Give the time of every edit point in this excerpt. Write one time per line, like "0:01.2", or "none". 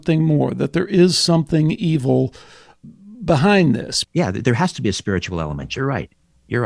0:02.8
0:03.9

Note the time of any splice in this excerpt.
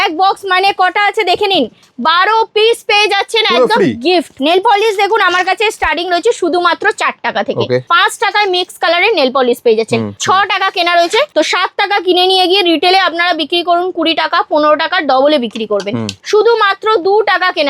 0:04.3
0:07.9
0:10.1
0:11.3
0:16.1

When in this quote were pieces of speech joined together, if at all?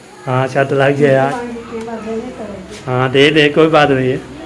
0:01.3

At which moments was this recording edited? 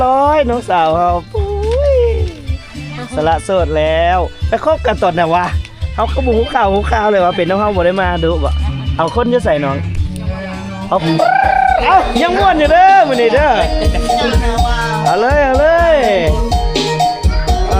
0:11.0

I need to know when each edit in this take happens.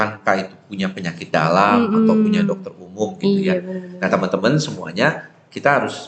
none

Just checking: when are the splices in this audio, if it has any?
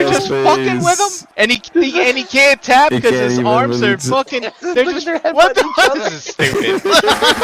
0:01.2

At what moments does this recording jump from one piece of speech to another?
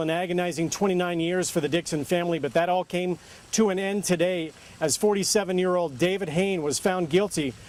none

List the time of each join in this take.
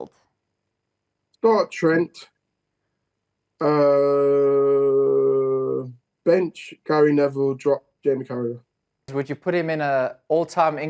0:09.1

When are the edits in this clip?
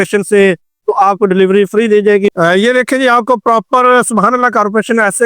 0:02.3

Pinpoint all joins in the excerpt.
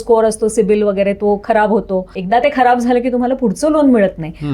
0:02.1

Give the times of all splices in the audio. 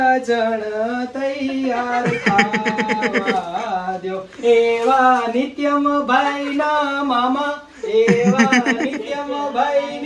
none

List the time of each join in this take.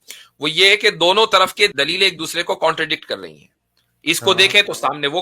0:01.7

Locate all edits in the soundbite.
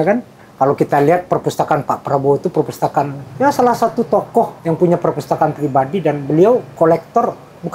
0:03.2
0:04.6
0:06.7

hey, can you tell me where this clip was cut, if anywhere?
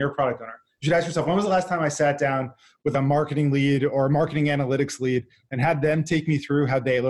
0:02.9

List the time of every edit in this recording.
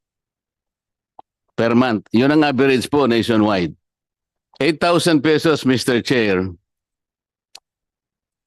none

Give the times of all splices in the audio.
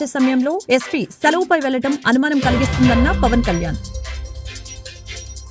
none

